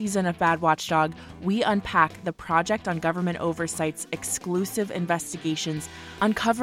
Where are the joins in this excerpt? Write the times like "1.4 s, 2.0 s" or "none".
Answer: none